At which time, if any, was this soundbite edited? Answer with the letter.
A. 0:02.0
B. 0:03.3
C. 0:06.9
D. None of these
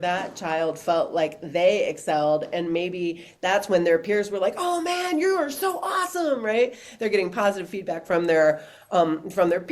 D